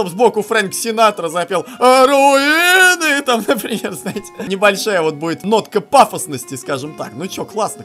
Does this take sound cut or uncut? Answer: cut